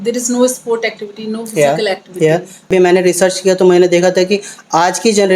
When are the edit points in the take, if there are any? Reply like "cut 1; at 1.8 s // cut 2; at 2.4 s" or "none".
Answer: cut 1; at 2.7 s